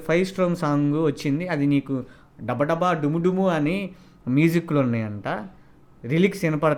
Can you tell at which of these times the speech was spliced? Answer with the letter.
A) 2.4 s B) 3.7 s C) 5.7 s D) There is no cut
D